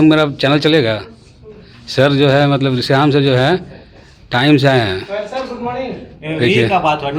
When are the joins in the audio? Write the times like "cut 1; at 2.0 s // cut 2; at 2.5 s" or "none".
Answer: none